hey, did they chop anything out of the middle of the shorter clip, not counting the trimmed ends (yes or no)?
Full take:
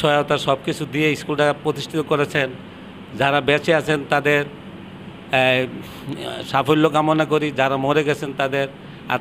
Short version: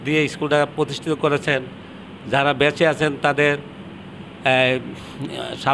no